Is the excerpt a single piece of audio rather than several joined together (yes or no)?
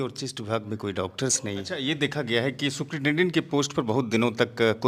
no